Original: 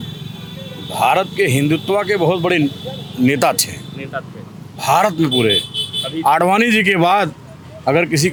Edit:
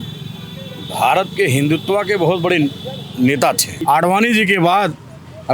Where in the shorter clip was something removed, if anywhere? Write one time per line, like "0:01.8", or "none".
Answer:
0:03.7